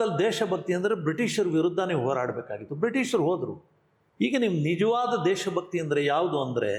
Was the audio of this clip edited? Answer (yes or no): no